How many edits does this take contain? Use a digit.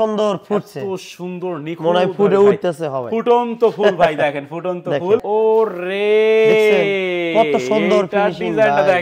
1